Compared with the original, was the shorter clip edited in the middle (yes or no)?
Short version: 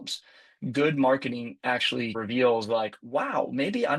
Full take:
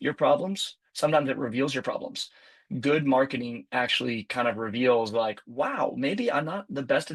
yes